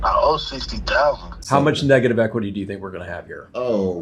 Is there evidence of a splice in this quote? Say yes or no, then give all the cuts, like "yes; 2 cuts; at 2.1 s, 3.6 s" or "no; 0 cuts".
yes; 1 cut; at 1.3 s